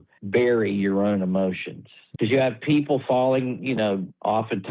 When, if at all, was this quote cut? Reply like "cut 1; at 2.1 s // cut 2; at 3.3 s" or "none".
none